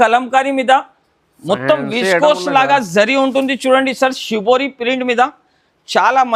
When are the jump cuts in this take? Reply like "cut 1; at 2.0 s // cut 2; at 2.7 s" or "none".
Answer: none